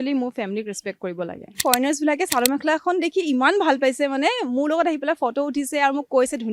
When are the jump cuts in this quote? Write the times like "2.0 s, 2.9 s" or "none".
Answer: 1.6 s